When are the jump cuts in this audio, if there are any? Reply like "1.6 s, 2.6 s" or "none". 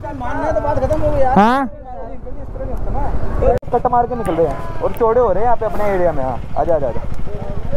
3.6 s

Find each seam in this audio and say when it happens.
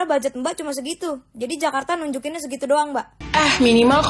3.2 s

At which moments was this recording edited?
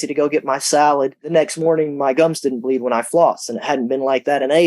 1.3 s

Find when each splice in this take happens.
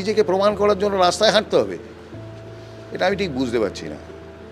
none

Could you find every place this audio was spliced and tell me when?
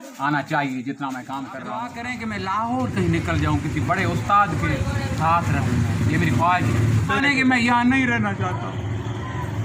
2.0 s, 7.2 s

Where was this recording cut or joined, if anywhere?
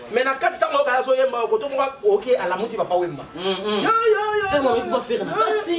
none

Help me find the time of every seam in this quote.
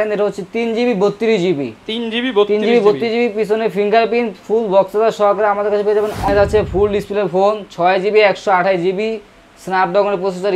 6.2 s

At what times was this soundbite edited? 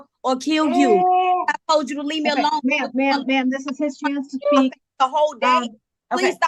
none

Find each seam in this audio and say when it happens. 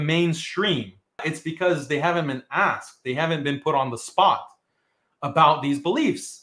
1.3 s

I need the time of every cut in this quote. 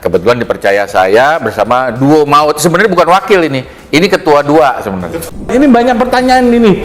5.4 s

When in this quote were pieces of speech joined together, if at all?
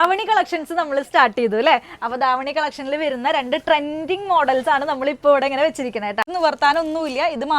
6.3 s

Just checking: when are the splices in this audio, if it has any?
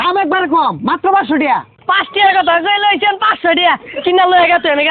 1.7 s

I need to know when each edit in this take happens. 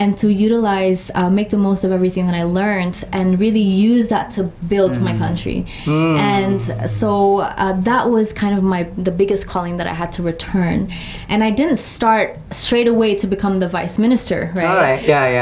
none

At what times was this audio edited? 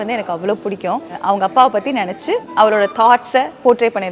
1.1 s, 2.5 s

